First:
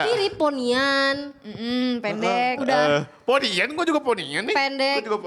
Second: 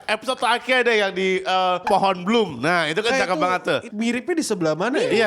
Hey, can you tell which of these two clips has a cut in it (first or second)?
second